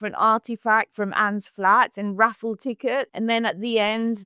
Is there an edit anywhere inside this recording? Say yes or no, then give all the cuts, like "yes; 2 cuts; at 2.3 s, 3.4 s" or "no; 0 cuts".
yes; 2 cuts; at 0.9 s, 3.1 s